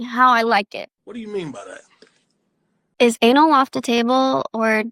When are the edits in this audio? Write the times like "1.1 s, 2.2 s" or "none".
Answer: 3.1 s